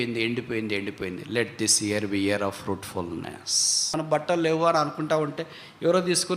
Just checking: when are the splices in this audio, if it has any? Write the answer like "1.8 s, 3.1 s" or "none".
4.0 s